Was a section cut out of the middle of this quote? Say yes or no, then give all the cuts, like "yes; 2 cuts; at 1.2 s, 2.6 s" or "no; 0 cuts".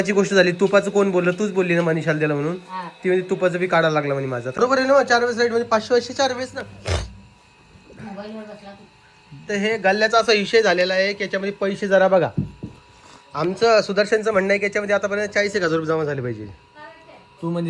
yes; 1 cut; at 4.5 s